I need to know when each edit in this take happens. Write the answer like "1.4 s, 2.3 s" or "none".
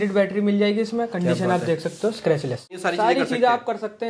2.8 s